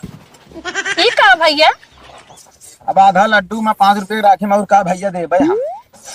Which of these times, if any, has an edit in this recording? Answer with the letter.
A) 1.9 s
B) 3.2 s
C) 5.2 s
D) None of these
D